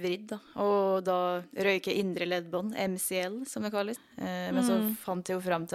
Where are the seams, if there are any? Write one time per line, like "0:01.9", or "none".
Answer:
0:04.0